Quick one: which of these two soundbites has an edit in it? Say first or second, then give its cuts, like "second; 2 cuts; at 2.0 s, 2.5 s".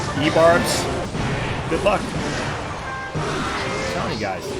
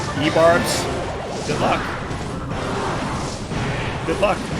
first; 1 cut; at 1.1 s